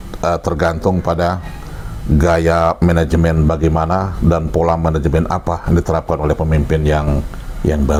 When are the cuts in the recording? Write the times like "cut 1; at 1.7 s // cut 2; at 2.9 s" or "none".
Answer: none